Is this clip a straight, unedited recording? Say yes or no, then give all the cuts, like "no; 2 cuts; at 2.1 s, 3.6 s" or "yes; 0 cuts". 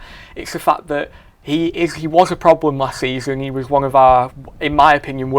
yes; 0 cuts